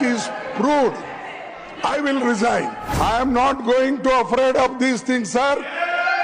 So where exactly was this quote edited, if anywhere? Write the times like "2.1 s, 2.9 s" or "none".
2.8 s